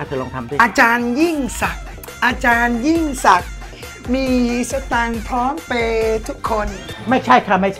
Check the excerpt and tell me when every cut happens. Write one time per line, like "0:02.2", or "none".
0:06.9

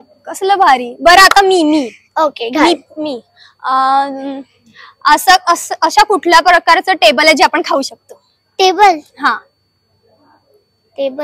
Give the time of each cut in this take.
none

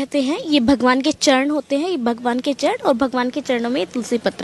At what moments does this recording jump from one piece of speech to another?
none

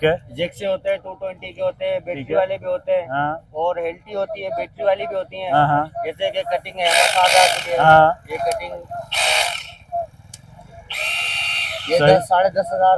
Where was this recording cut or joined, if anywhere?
none

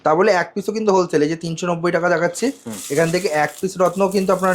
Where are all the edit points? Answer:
none

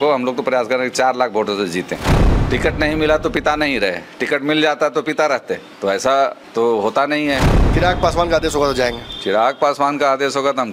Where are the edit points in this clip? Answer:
0:02.1
0:05.7
0:06.4
0:07.4

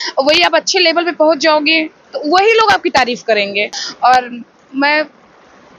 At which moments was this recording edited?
0:03.7

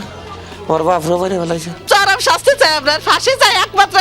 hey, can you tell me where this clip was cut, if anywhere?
0:01.8

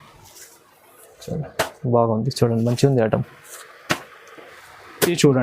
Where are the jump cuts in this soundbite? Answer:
0:04.4

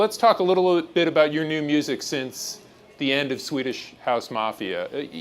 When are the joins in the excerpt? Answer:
0:02.8

